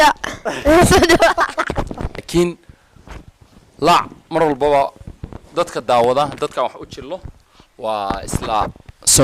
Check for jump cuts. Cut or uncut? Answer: cut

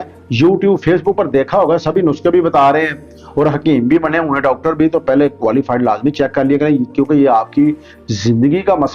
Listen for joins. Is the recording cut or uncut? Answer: uncut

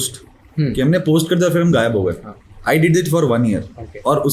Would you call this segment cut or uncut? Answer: uncut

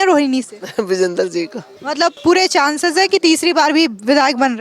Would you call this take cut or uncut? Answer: cut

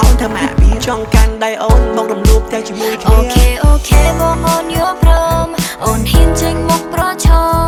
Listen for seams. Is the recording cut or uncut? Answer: uncut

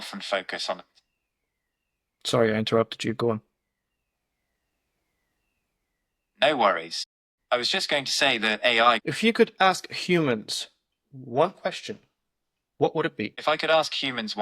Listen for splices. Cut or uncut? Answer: cut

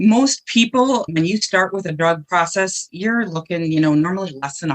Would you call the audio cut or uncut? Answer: cut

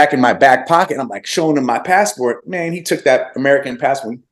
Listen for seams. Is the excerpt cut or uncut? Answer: uncut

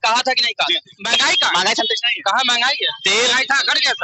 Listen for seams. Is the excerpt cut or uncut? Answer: cut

